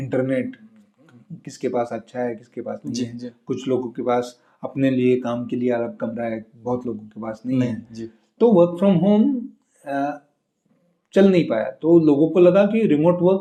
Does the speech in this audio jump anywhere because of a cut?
no; 0 cuts

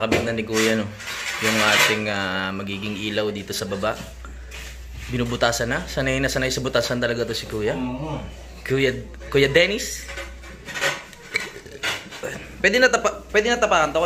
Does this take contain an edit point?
no; 0 cuts

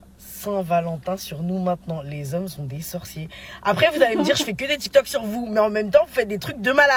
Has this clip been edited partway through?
no; 0 cuts

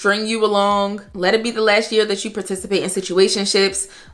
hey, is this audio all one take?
yes; 0 cuts

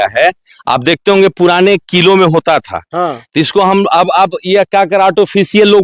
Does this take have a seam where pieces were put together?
no; 0 cuts

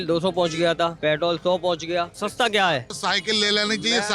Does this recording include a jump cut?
yes; 3 cuts; at 1.0 s, 2.1 s, 2.9 s

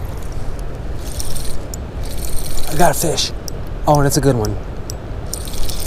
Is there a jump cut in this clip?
no; 0 cuts

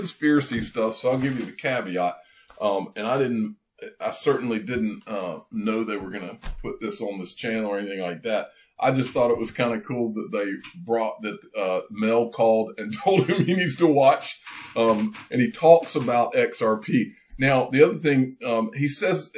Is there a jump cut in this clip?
no; 0 cuts

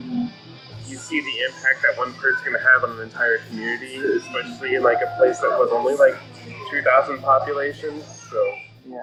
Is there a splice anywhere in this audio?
no; 0 cuts

